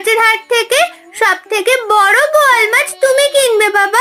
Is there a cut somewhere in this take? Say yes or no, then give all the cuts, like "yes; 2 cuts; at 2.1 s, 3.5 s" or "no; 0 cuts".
no; 0 cuts